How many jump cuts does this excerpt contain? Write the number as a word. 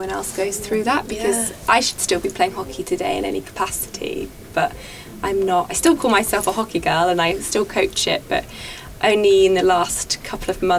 zero